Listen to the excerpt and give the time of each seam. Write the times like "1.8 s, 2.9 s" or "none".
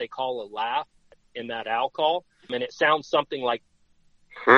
1.1 s, 2.5 s, 3.6 s

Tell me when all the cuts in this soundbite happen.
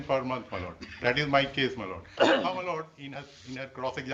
none

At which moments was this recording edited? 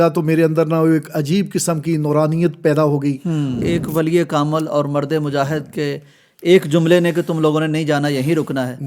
3.6 s

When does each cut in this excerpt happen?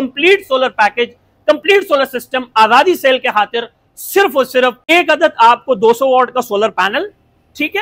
4.9 s

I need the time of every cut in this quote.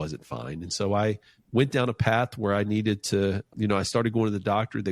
3.4 s

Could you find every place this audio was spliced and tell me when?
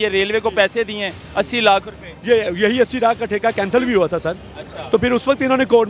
none

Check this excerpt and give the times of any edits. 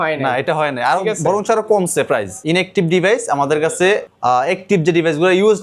2.4 s, 4.1 s

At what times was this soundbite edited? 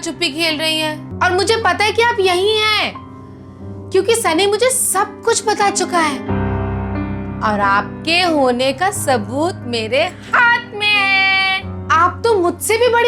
1.0 s

